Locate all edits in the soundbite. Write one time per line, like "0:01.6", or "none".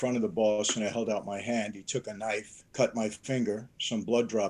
0:02.6